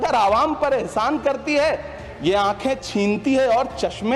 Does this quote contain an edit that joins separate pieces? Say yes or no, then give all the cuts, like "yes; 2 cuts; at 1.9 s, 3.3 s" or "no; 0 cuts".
no; 0 cuts